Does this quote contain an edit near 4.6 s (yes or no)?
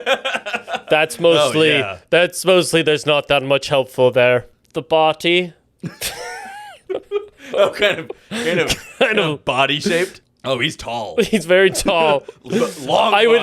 yes